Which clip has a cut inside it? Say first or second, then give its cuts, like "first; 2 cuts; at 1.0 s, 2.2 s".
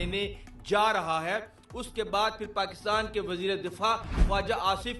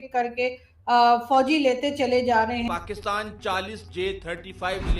second; 1 cut; at 2.7 s